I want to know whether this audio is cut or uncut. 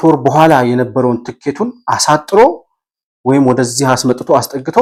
uncut